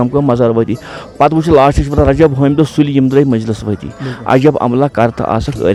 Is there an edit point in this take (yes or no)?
no